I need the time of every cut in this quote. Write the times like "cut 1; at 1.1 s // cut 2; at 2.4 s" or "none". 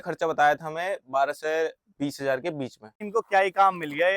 cut 1; at 3.0 s